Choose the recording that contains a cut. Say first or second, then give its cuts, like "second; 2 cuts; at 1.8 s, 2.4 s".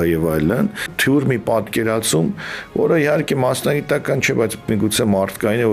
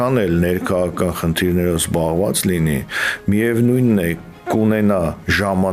first; 1 cut; at 0.9 s